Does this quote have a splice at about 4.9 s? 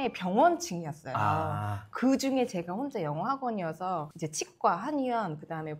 no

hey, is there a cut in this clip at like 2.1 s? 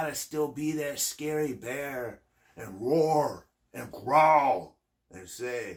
no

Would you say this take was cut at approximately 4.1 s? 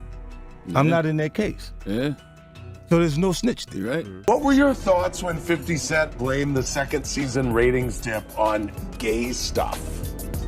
yes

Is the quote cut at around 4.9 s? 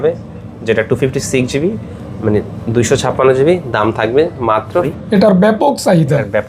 yes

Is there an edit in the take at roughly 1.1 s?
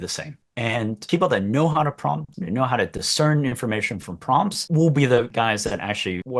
no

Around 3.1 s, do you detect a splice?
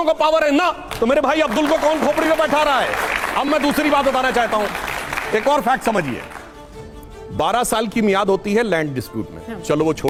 no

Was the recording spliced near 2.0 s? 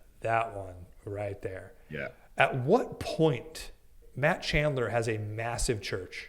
no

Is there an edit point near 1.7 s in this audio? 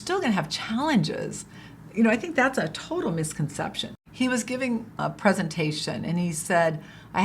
no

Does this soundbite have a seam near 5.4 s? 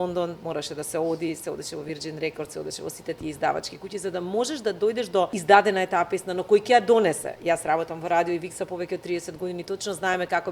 yes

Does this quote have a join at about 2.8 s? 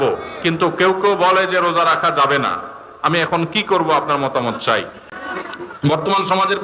no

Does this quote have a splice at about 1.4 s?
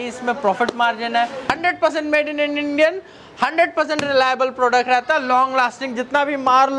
yes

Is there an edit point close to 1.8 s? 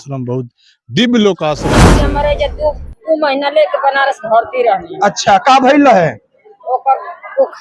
yes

